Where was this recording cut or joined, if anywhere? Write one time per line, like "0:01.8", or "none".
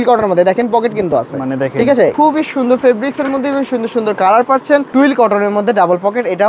0:02.1
0:04.9